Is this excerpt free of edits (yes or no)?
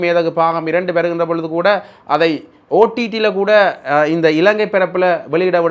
yes